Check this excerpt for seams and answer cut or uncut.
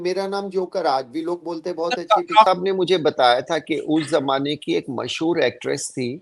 cut